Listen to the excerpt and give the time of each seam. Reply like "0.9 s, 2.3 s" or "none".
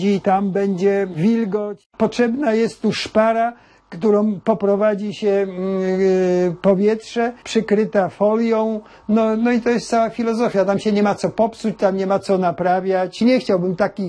1.9 s, 7.4 s, 13.2 s